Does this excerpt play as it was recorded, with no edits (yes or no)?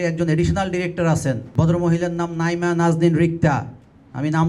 no